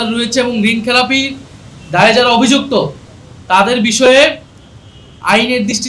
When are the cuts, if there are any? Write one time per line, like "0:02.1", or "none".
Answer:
none

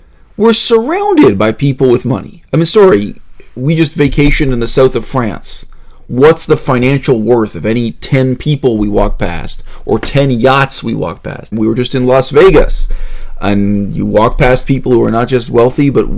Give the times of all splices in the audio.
0:11.5

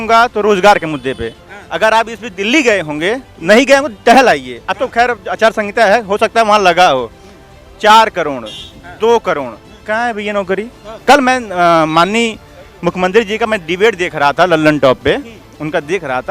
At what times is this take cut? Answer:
0:10.8

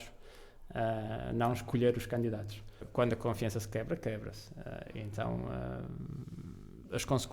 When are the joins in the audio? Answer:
0:02.7

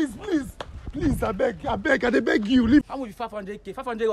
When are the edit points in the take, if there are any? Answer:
0:02.8

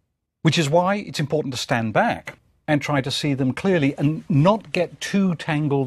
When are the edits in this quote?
0:03.1

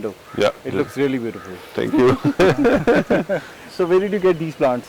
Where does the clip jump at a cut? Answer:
none

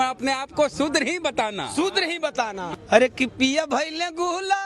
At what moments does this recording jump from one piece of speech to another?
0:02.7

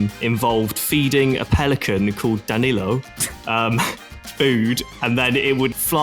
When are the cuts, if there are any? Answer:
none

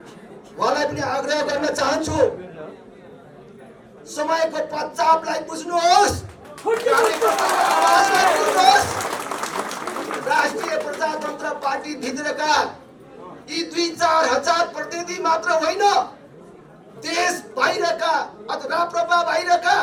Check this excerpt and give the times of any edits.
none

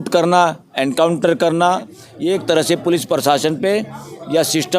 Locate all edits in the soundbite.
0:02.0

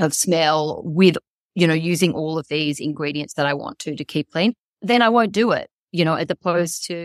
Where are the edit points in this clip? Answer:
none

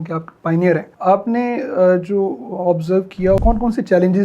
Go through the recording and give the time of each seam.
0:00.9

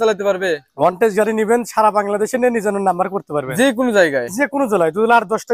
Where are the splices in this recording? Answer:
none

